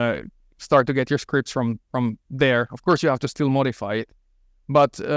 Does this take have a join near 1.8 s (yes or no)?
no